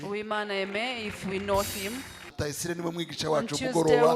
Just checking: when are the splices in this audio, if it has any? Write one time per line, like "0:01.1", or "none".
0:02.3

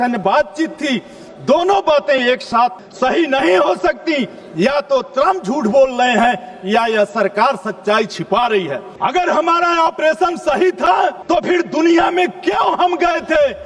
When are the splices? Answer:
0:02.8
0:08.9
0:11.2

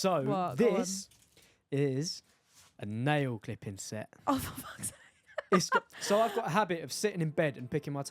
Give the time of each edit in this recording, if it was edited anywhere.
none

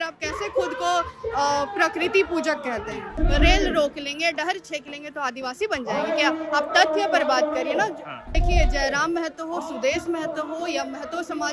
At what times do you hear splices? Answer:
0:03.1
0:08.4

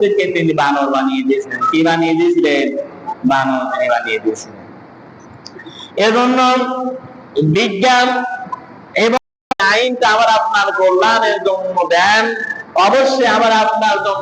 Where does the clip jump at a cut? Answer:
0:09.2

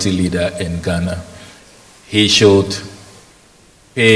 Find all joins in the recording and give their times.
none

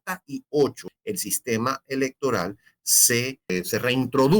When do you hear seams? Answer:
0:00.9
0:03.5

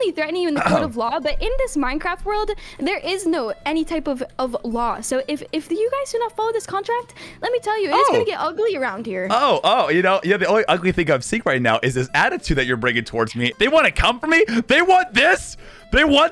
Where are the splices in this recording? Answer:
0:13.5

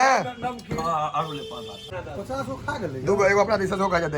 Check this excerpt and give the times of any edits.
0:01.8

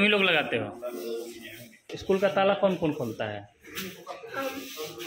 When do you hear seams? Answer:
0:01.9

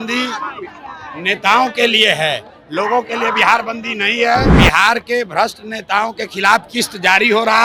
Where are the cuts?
0:04.6

